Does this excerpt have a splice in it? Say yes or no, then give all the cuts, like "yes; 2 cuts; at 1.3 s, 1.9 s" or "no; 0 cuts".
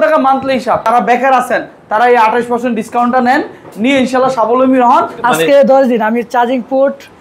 yes; 2 cuts; at 0.9 s, 5.1 s